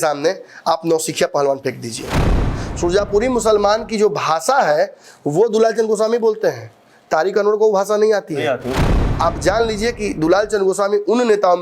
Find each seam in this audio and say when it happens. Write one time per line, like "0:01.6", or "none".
0:02.5
0:08.8